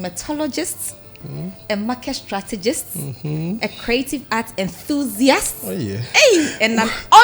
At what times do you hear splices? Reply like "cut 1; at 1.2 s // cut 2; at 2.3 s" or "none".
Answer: none